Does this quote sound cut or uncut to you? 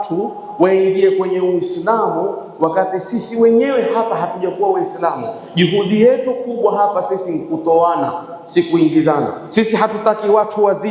cut